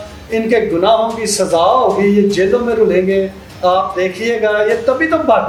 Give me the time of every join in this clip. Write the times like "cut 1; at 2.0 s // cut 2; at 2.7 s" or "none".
none